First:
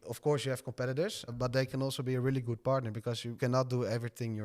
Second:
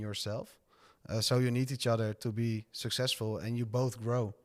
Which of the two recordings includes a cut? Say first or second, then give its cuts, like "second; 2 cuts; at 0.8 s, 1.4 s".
first; 1 cut; at 3.3 s